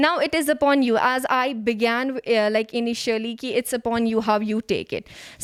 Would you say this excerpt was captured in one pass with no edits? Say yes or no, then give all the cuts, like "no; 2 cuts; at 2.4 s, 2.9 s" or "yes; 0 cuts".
yes; 0 cuts